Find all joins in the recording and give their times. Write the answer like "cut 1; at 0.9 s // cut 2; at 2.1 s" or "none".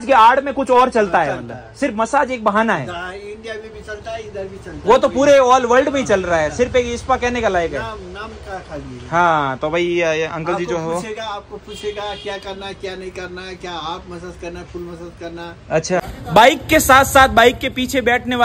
cut 1; at 16.0 s

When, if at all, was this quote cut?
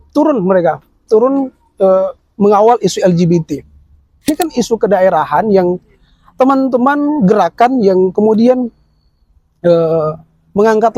cut 1; at 4.3 s

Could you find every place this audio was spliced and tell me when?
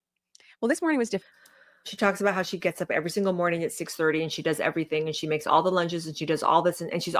cut 1; at 1.9 s

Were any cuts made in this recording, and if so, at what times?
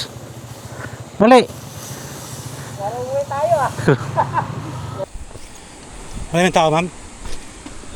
cut 1; at 5.0 s

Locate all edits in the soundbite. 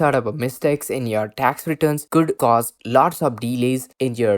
cut 1; at 2.2 s

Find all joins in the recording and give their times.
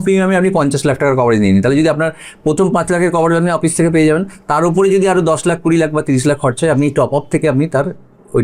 none

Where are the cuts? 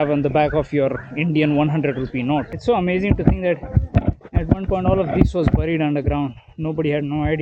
cut 1; at 2.5 s

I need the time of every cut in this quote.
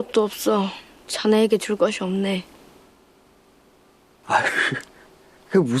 cut 1; at 4.2 s

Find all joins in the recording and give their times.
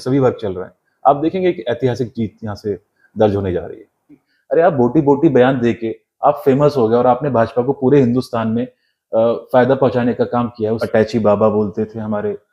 cut 1; at 4.3 s // cut 2; at 10.8 s

